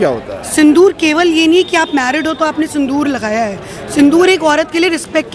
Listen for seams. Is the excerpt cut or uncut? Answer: uncut